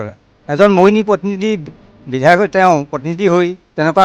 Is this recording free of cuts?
yes; 0 cuts

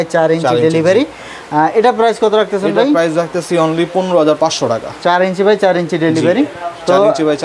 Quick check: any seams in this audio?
no; 0 cuts

